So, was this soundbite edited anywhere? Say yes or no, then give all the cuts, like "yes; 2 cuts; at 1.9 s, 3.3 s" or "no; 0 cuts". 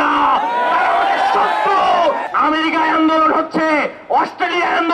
yes; 1 cut; at 2.3 s